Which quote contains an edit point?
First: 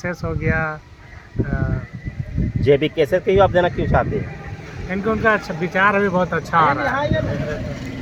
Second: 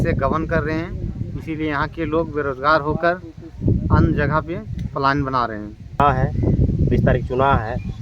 second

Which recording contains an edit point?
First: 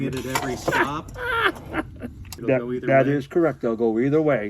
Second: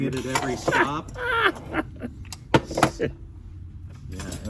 first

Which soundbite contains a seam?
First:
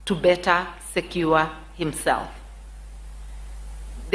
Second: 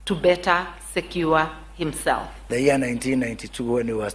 second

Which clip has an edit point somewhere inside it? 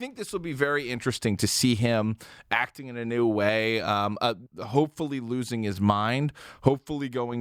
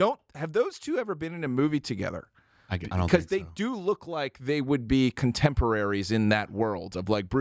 first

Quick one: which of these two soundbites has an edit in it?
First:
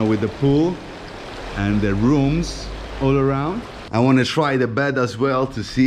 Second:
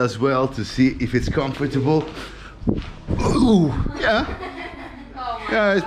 first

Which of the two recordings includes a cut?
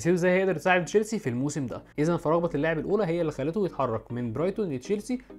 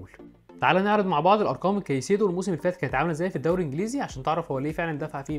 first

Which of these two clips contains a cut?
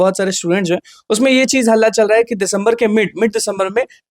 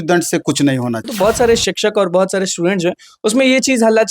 second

